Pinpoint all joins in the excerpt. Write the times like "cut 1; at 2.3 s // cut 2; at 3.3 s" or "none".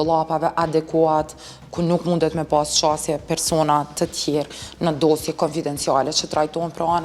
none